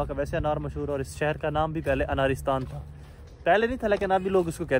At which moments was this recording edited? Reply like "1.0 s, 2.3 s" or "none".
none